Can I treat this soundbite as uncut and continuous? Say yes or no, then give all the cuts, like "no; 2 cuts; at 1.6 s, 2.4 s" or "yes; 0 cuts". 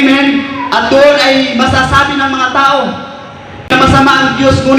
no; 1 cut; at 3.7 s